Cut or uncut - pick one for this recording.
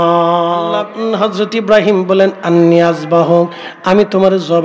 cut